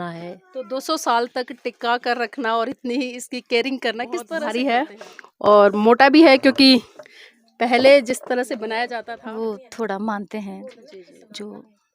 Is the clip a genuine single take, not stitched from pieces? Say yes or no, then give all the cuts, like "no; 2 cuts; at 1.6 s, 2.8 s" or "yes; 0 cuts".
no; 2 cuts; at 4.4 s, 8.9 s